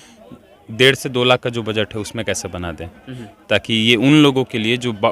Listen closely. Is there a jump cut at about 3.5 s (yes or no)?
no